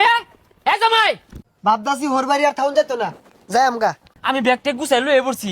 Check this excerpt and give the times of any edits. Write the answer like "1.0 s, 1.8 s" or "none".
1.4 s, 4.1 s